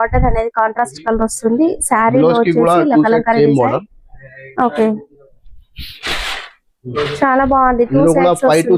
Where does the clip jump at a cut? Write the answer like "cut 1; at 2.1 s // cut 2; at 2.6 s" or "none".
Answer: none